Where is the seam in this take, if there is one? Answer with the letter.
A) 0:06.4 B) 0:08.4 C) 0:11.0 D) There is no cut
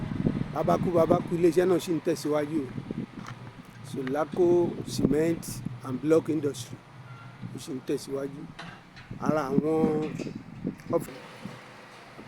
C